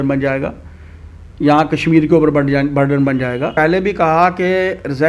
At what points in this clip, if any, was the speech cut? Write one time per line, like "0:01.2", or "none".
0:03.5